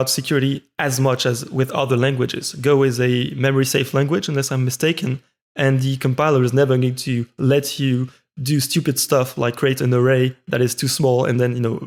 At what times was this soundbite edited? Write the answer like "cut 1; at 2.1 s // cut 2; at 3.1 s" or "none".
none